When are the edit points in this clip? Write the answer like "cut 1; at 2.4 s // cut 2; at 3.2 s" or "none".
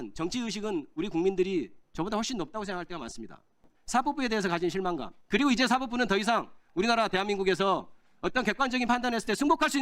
cut 1; at 3.6 s